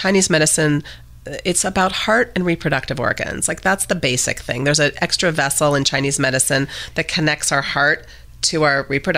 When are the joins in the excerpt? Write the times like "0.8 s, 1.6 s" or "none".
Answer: none